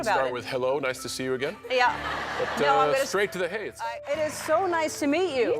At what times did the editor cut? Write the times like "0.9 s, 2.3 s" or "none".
4.0 s